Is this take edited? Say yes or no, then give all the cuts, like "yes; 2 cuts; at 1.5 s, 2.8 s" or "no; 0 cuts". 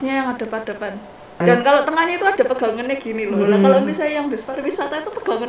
yes; 1 cut; at 1.4 s